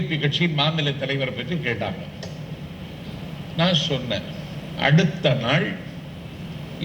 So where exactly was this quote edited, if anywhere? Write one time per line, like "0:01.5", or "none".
none